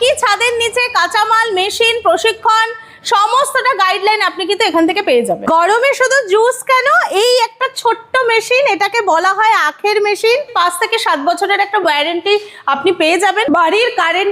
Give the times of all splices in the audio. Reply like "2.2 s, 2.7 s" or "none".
5.4 s, 10.5 s, 13.5 s